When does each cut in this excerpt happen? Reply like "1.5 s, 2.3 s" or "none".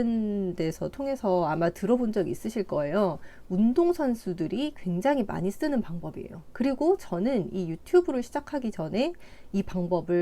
none